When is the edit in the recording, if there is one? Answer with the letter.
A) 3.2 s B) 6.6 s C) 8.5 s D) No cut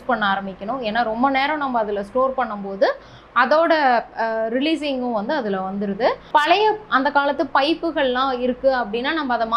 D